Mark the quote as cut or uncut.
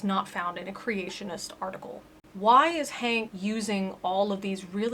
cut